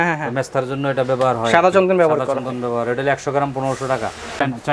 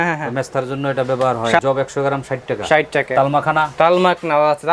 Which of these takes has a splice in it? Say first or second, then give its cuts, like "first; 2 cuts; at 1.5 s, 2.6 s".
second; 2 cuts; at 1.6 s, 3.1 s